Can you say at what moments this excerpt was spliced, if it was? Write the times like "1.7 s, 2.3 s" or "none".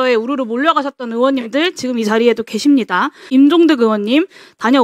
3.3 s

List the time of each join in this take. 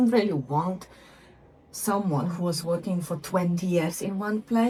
none

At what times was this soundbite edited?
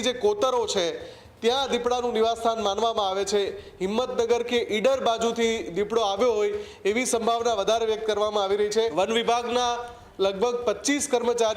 8.9 s

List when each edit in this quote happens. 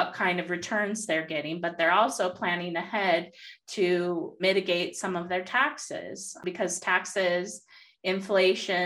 4.3 s, 6.4 s

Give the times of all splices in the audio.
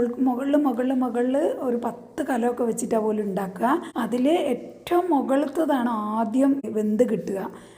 3.9 s, 6.7 s

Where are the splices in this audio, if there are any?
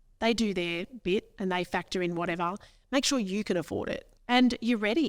4.1 s

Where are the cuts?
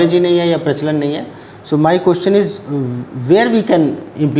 none

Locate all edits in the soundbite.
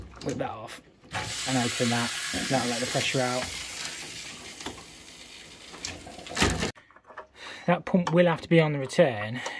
6.7 s

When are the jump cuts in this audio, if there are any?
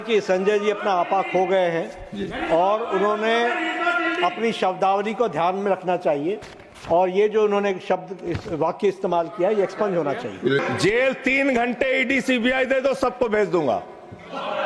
10.6 s

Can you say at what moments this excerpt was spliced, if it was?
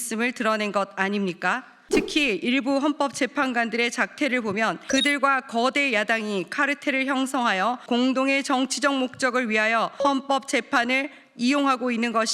1.7 s, 4.8 s, 7.8 s, 9.9 s

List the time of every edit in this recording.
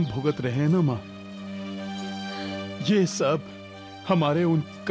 none

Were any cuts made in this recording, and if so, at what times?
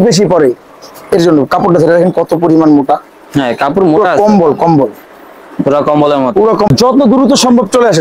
6.7 s

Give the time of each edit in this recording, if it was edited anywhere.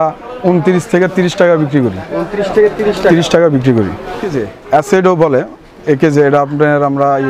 4.4 s

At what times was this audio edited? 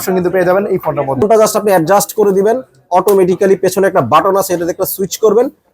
1.2 s

